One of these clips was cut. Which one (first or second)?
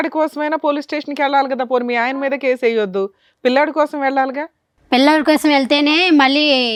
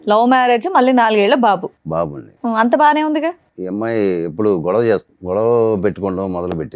second